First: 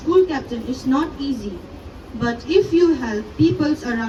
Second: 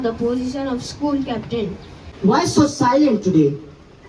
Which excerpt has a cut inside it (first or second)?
second